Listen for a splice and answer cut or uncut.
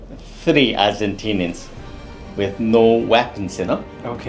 uncut